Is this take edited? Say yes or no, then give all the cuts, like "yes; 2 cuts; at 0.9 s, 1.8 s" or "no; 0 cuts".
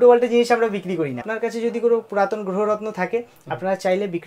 yes; 1 cut; at 1.3 s